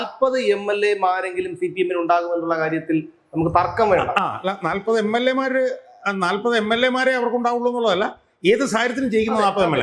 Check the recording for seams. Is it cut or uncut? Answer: uncut